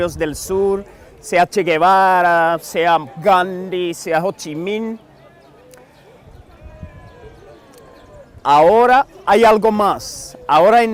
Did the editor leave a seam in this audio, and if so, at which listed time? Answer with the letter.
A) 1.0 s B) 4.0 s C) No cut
C